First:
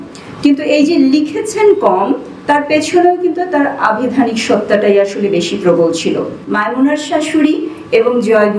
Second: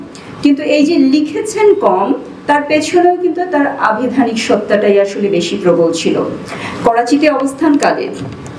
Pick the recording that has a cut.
first; 1 cut; at 6.4 s

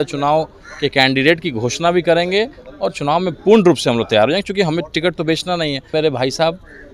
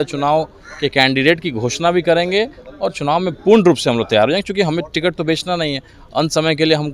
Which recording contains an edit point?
first; 1 cut; at 5.9 s

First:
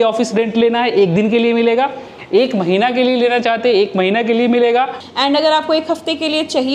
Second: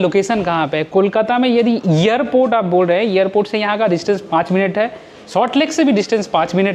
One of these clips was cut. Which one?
first; 1 cut; at 5.0 s

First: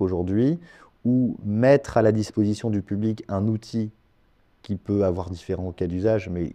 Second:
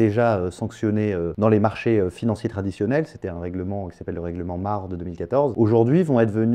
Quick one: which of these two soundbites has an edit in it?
second; 2 cuts; at 1.3 s, 5.5 s

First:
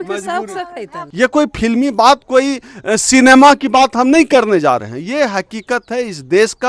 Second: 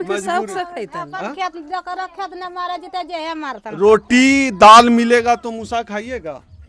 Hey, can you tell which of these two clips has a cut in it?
first; 1 cut; at 1.0 s

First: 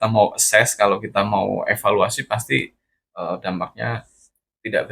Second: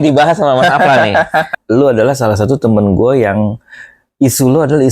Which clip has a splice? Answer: second; 1 cut; at 1.5 s

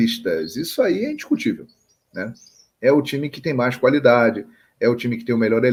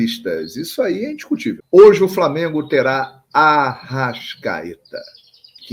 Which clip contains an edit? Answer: second; 1 cut; at 1.5 s

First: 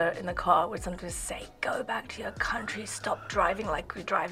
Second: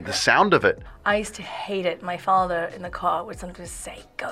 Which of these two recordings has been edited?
second; 1 cut; at 0.9 s

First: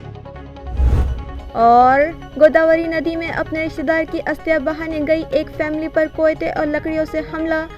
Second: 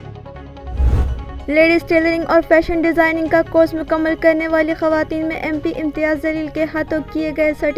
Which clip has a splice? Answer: first; 1 cut; at 0.9 s

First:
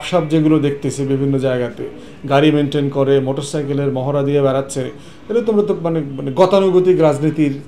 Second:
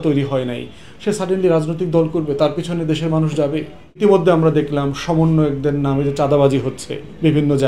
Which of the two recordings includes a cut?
second; 1 cut; at 4.0 s

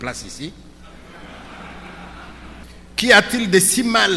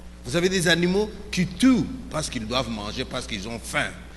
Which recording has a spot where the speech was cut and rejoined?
first; 1 cut; at 2.7 s

